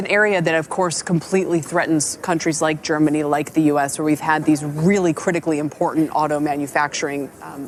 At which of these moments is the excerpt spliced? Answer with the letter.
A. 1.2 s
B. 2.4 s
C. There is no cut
C